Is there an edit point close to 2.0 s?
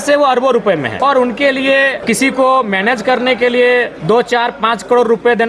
yes; 3 cuts; at 0.9 s, 2.0 s, 3.9 s

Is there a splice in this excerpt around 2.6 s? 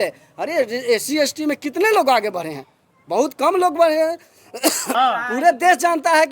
no; 1 cut; at 4.9 s

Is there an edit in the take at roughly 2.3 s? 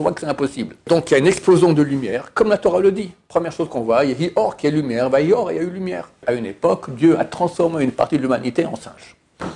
no; 2 cuts; at 0.8 s, 6.2 s

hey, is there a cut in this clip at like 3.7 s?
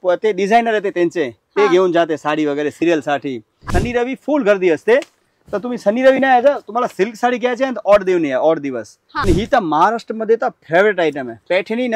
yes; 2 cuts; at 3.7 s, 9.1 s

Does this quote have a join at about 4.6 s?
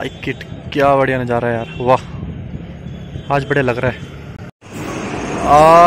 yes; 1 cut; at 4.6 s

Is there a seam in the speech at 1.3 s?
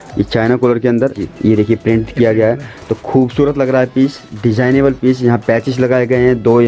yes; 1 cut; at 1.3 s

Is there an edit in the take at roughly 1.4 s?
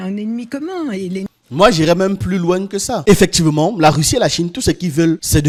no; 0 cuts

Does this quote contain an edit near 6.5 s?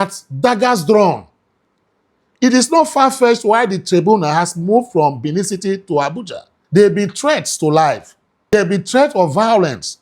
yes; 2 cuts; at 6.5 s, 8.5 s

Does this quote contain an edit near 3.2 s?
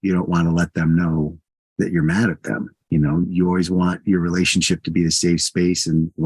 yes; 1 cut; at 3.2 s

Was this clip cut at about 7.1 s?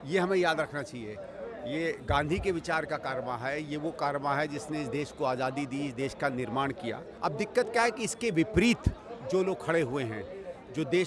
yes; 1 cut; at 7.1 s

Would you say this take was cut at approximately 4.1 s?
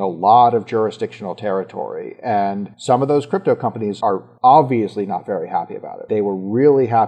yes; 3 cuts; at 2.7 s, 4.1 s, 6.0 s

